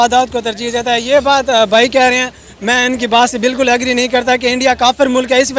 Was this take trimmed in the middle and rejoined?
no; 0 cuts

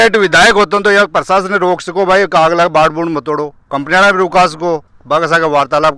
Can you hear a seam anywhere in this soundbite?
no; 0 cuts

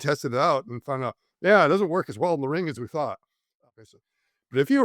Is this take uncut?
no; 1 cut; at 3.6 s

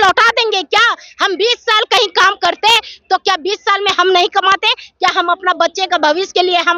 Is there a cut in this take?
no; 0 cuts

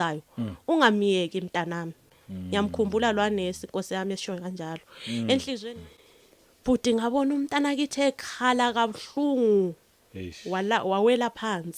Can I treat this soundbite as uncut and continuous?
no; 1 cut; at 5.6 s

